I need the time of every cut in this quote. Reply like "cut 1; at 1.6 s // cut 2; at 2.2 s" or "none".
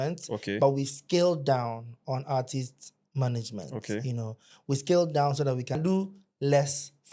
cut 1; at 5.8 s